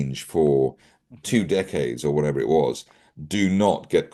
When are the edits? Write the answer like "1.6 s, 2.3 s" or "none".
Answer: none